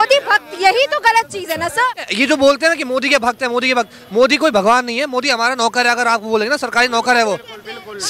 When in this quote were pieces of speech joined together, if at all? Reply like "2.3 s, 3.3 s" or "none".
2.1 s